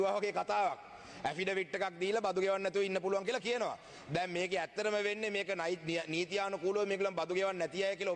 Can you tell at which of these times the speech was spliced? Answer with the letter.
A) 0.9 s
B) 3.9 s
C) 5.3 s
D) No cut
D